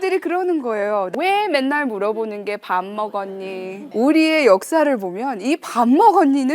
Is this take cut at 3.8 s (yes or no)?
yes